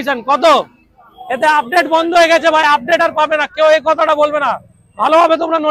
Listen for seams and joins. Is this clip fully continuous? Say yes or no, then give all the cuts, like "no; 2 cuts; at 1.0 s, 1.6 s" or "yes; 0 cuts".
yes; 0 cuts